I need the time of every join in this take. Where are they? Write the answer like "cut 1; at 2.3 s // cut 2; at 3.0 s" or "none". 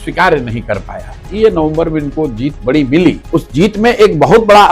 cut 1; at 1.2 s // cut 2; at 3.2 s